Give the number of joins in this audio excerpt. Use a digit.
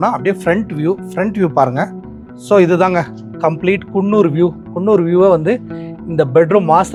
0